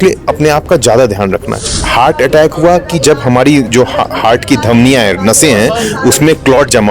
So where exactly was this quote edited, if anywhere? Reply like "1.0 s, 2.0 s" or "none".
1.7 s